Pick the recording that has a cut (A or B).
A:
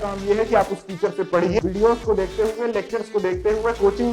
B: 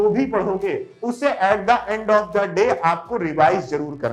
A